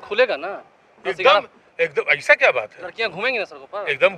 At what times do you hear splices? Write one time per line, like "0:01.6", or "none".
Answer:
none